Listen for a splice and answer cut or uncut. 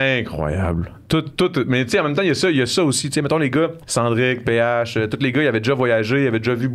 uncut